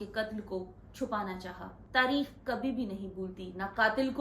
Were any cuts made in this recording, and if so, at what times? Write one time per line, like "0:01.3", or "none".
0:01.7